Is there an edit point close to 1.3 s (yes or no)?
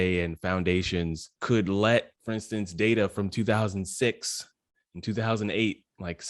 yes